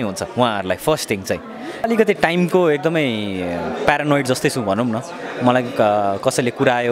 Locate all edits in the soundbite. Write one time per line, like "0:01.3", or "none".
0:01.9